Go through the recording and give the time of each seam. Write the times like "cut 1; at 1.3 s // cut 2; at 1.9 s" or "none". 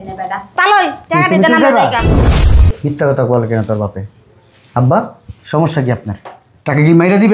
cut 1; at 2.5 s